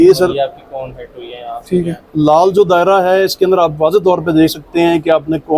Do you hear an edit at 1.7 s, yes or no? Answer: no